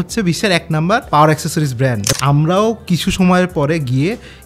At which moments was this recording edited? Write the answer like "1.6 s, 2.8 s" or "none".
1.1 s, 2.0 s